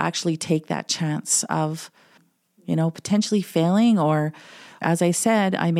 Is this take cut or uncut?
cut